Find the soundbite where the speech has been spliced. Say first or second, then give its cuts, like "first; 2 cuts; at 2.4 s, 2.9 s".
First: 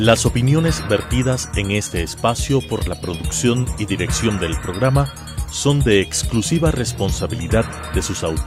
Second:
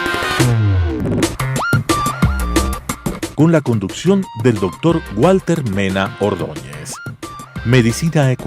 second; 1 cut; at 1.2 s